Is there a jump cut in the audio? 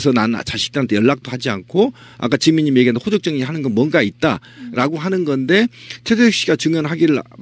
no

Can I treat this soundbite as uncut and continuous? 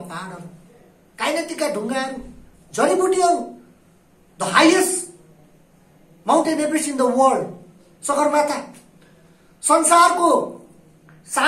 yes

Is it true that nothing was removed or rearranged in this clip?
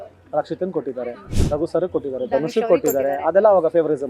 yes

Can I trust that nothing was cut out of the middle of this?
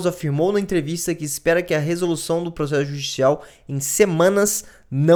yes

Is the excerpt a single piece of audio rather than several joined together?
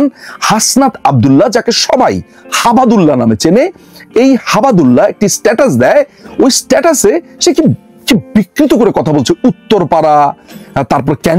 yes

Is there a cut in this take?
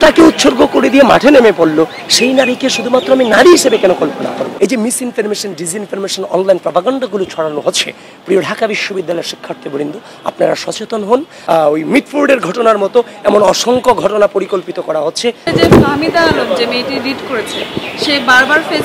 yes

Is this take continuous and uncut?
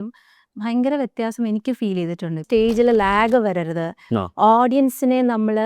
no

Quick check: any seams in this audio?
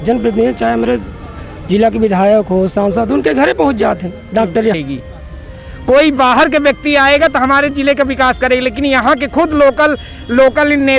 yes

